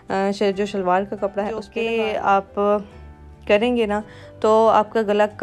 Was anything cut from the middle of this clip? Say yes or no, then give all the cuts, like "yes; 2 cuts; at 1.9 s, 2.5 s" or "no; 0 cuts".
yes; 1 cut; at 1.7 s